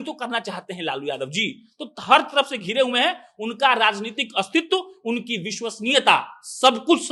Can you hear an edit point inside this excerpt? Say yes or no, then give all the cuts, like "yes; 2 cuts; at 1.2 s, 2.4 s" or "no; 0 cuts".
no; 0 cuts